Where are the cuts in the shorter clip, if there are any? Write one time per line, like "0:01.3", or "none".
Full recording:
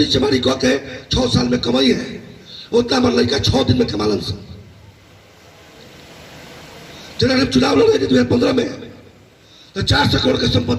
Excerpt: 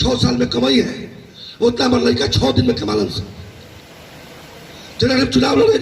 0:03.5